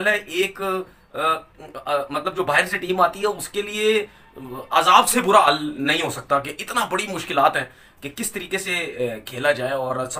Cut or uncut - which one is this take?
uncut